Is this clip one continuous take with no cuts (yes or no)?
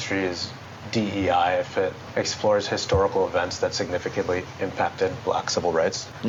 yes